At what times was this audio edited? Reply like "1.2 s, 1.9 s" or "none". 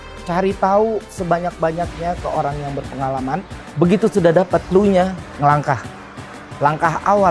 3.6 s, 4.7 s, 5.2 s